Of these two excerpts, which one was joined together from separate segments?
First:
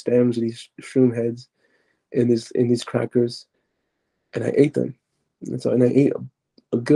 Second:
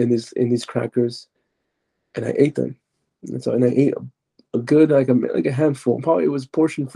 second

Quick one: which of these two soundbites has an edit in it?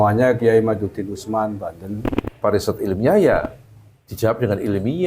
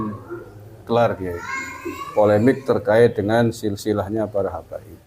first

